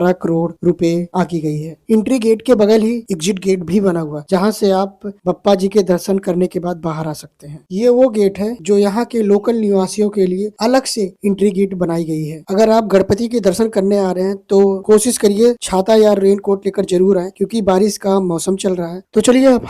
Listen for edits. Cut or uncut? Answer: uncut